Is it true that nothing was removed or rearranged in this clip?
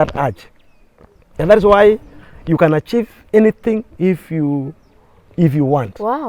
yes; 0 cuts

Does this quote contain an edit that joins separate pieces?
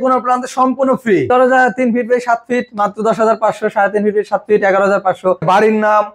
yes; 2 cuts; at 1.3 s, 5.4 s

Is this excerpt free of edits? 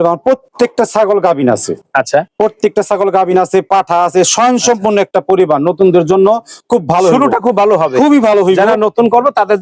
yes; 0 cuts

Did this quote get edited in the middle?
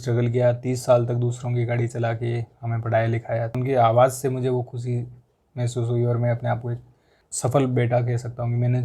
no; 0 cuts

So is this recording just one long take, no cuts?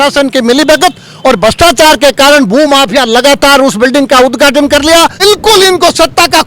no; 1 cut; at 5.2 s

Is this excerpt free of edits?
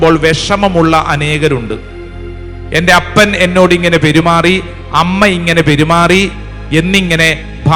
yes; 0 cuts

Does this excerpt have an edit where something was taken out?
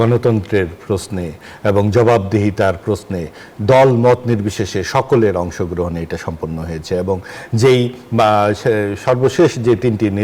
no; 0 cuts

